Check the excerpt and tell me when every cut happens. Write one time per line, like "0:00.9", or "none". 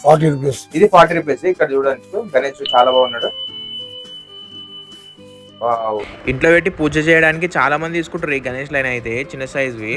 none